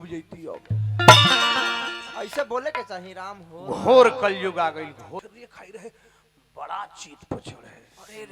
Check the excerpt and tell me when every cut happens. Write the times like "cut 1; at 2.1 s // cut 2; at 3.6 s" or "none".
cut 1; at 5.3 s

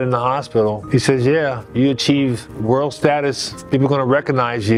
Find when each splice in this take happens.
none

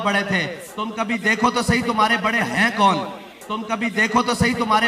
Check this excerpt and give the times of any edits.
none

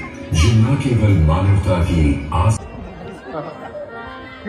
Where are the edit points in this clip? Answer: cut 1; at 2.6 s

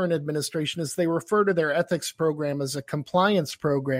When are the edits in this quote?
none

